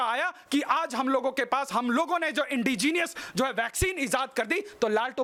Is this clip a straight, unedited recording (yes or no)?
yes